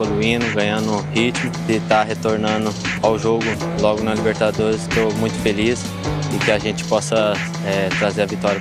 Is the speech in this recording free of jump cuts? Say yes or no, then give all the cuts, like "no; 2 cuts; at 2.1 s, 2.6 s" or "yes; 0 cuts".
yes; 0 cuts